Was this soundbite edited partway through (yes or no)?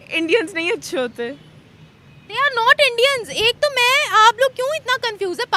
no